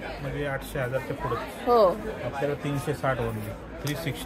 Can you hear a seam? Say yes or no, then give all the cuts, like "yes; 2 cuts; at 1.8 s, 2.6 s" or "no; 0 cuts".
no; 0 cuts